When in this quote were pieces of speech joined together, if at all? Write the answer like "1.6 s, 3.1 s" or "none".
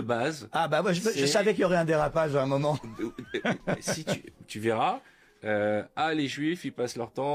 none